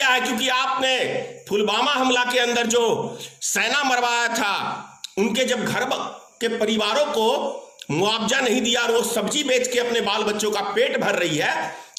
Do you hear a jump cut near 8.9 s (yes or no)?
no